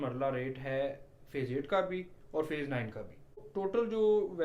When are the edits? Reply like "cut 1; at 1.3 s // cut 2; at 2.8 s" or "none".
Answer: cut 1; at 3.5 s